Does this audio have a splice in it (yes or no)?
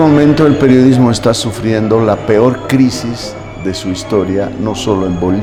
no